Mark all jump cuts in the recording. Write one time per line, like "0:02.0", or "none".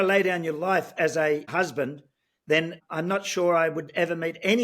0:01.5
0:02.8

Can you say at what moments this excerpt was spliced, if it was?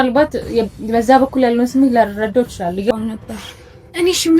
0:02.9

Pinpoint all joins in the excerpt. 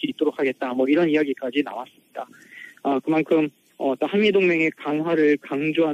0:04.3

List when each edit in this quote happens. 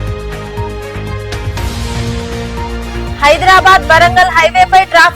0:01.4

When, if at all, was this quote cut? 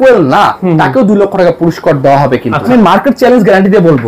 0:02.6

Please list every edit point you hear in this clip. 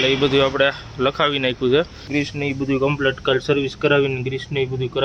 0:02.1

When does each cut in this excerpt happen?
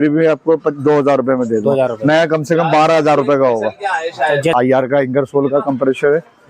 0:04.5

